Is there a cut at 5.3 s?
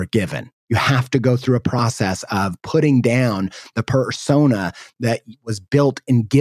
no; 0 cuts

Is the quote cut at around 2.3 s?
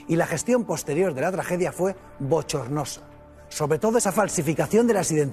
no; 1 cut; at 4.0 s

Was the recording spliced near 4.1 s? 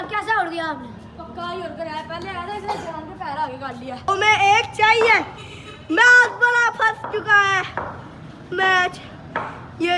yes; 1 cut; at 4.1 s

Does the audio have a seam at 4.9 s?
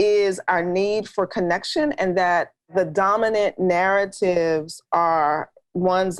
no; 1 cut; at 2.7 s

